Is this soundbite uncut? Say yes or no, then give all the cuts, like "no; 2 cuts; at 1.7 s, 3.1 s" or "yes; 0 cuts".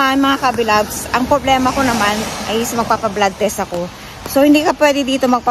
yes; 0 cuts